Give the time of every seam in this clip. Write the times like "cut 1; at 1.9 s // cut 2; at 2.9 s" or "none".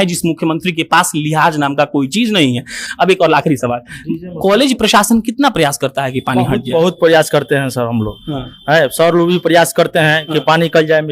none